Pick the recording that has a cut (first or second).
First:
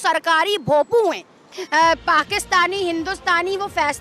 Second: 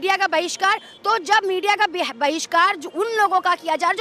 first